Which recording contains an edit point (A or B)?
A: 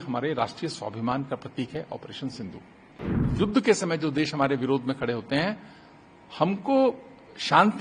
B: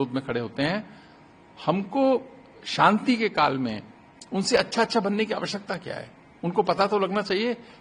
A